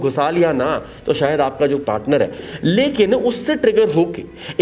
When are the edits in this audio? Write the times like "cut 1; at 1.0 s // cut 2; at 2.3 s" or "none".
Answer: cut 1; at 2.4 s

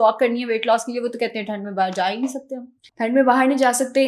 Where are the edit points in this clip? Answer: none

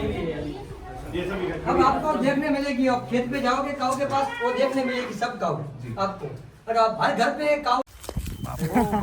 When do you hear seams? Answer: cut 1; at 7.9 s

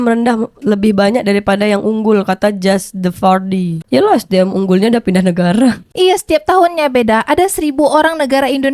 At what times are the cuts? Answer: none

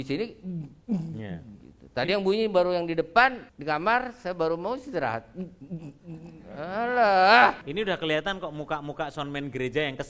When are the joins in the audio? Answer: cut 1; at 3.5 s // cut 2; at 7.6 s

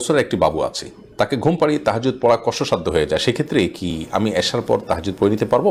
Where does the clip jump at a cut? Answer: none

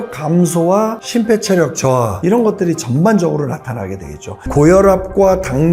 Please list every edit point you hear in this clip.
cut 1; at 2.1 s // cut 2; at 4.5 s

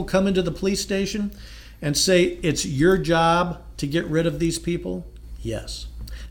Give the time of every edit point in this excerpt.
none

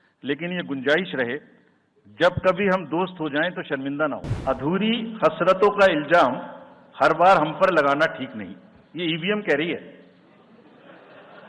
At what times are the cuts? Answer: cut 1; at 4.3 s

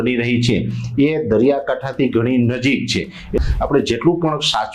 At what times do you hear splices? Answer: cut 1; at 3.4 s

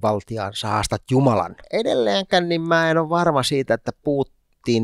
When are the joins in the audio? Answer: cut 1; at 1.6 s

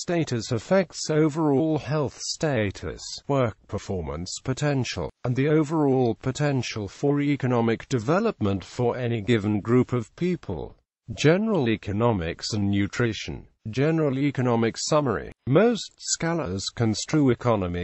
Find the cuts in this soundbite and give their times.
none

